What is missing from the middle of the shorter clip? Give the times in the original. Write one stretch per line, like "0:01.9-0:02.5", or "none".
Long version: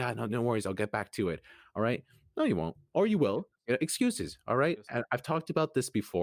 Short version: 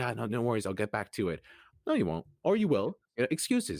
0:01.6-0:02.1